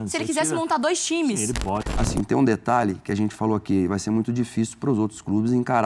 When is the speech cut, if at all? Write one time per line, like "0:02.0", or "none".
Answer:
0:01.9